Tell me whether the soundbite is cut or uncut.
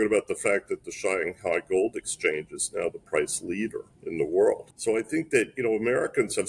cut